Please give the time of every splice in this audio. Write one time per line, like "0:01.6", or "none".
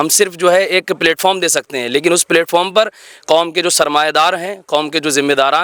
none